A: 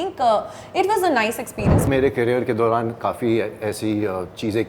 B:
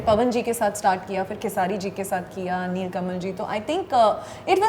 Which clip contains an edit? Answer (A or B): A